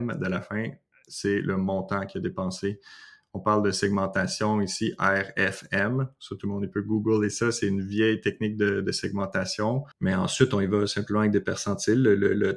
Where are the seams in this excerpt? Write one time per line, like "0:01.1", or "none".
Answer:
0:09.9